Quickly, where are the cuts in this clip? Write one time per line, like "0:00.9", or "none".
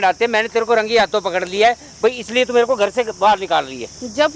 none